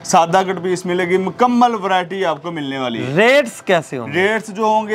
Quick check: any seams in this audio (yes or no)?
no